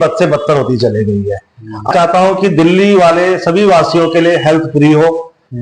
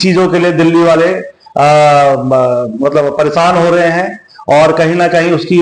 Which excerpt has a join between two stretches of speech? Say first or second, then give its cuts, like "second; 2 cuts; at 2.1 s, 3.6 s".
first; 1 cut; at 1.9 s